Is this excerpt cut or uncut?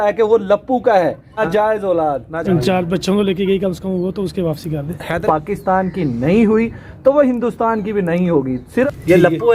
cut